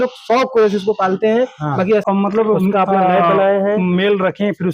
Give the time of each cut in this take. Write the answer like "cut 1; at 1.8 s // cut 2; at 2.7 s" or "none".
cut 1; at 2.0 s